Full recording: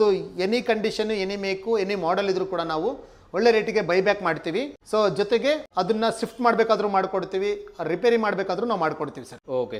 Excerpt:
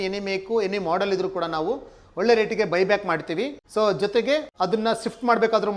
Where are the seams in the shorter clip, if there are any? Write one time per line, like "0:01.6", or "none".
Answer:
none